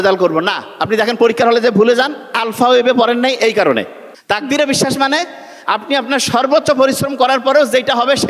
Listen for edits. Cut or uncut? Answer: cut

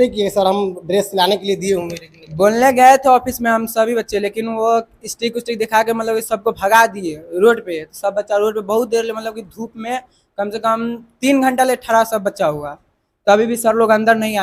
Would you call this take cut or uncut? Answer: uncut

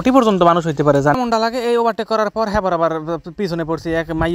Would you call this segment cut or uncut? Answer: cut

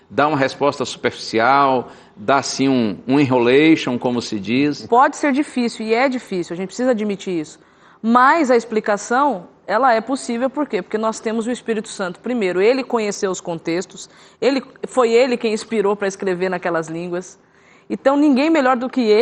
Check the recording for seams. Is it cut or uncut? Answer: cut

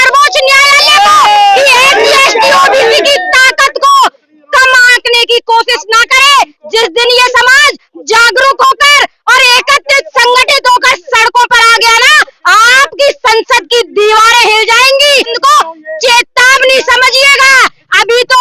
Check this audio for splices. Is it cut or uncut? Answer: cut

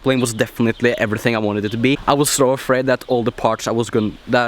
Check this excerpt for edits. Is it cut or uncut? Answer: cut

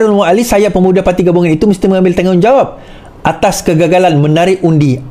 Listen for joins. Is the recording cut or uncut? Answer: uncut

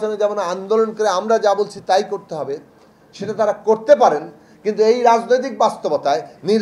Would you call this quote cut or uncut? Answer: uncut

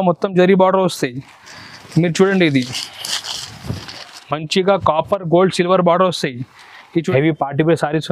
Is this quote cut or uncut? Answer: cut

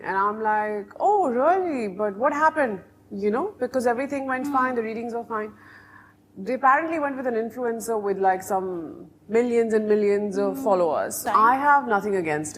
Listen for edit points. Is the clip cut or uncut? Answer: cut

